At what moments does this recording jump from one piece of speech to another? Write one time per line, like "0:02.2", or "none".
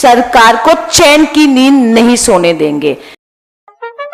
0:03.1

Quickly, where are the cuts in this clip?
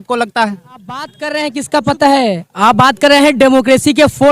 0:01.2

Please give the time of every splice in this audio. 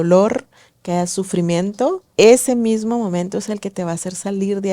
0:02.0

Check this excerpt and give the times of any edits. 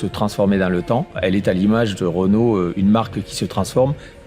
0:01.2

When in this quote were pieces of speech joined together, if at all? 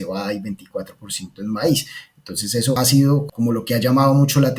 0:03.1

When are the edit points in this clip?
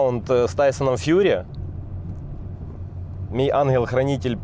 none

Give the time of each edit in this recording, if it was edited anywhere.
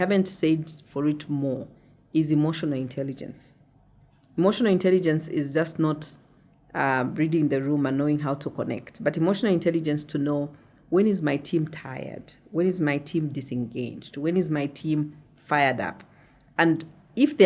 none

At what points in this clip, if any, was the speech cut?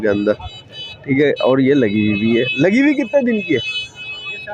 none

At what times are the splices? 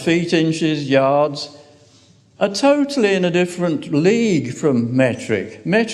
0:04.7

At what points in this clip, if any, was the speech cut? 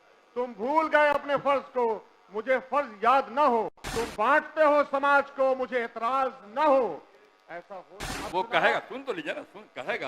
0:03.8
0:08.0

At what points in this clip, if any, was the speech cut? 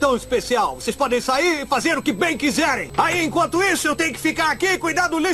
0:02.8

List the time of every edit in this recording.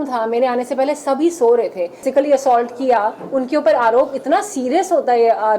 0:02.1

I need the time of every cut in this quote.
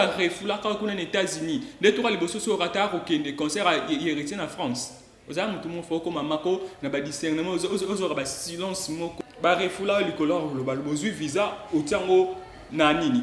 0:09.1

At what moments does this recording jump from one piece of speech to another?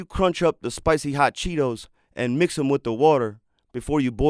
none

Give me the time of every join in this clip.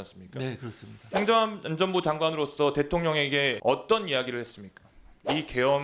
0:03.6

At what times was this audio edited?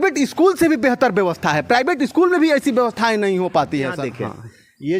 0:04.0

